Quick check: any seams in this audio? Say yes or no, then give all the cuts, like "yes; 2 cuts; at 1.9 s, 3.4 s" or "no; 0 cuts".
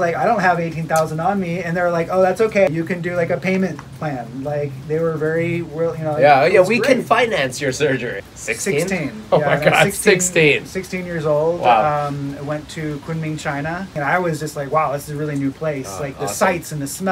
yes; 2 cuts; at 8.2 s, 13.9 s